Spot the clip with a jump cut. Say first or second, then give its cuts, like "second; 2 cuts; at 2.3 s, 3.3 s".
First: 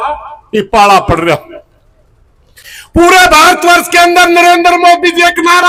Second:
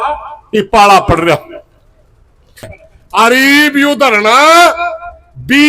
second; 1 cut; at 2.8 s